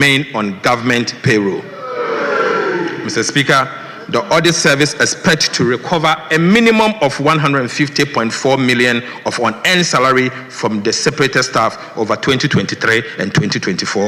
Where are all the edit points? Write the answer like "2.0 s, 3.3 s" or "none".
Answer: none